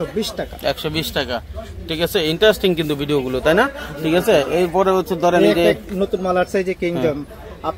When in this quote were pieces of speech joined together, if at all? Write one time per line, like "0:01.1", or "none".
none